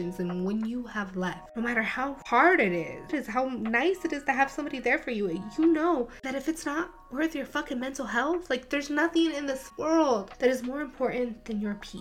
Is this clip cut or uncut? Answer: cut